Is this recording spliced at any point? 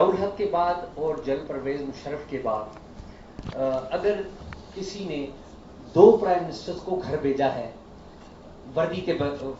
yes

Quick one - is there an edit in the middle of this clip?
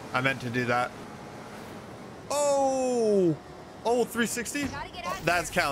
yes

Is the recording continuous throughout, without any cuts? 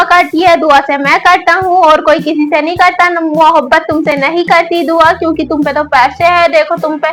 yes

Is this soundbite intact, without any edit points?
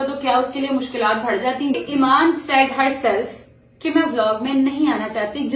no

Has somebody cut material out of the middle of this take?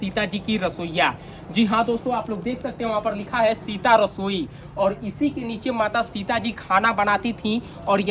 no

